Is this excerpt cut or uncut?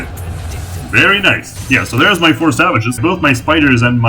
cut